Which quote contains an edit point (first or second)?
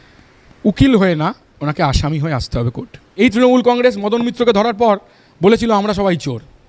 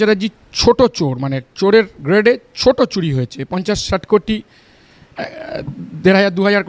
first